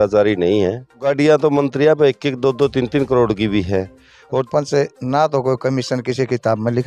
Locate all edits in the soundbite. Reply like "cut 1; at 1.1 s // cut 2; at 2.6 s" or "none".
cut 1; at 1.0 s // cut 2; at 4.4 s